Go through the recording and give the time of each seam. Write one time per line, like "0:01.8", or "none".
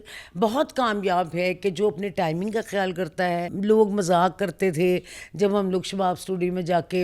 0:03.5